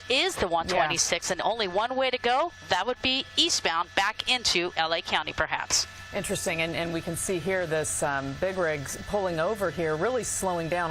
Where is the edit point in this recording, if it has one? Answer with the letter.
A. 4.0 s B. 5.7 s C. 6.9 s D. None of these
B